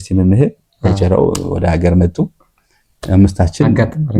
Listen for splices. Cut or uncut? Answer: uncut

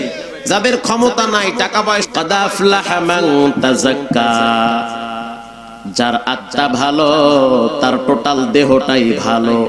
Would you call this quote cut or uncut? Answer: cut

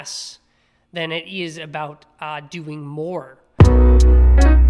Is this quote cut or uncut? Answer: cut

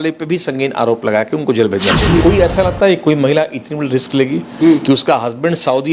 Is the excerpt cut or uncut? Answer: cut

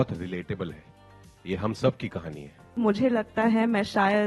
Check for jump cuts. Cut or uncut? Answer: cut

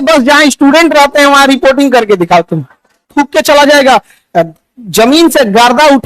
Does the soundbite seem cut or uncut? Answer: cut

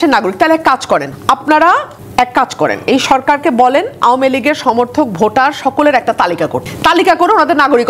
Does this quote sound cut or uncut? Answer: cut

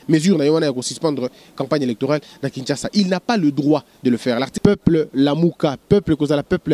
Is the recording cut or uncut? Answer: cut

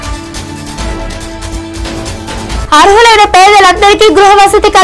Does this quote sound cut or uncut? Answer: cut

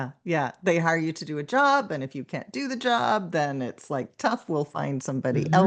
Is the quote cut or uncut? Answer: uncut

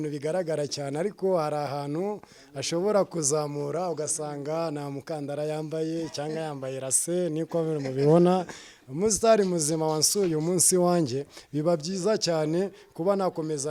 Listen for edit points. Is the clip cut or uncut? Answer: uncut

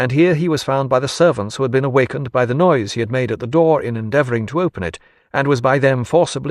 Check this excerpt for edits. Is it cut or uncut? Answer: uncut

